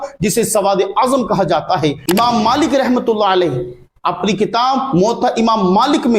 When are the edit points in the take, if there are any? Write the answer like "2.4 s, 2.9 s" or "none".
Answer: 2.0 s